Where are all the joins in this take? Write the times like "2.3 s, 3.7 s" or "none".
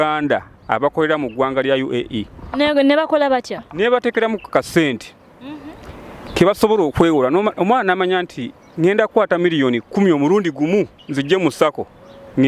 none